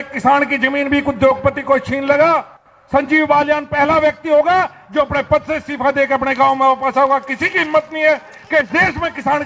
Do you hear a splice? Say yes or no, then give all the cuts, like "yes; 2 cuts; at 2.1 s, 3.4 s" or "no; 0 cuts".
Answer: no; 0 cuts